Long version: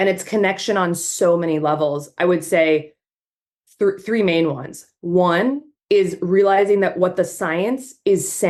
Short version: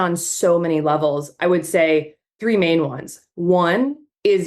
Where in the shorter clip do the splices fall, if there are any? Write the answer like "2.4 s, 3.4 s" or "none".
2.4 s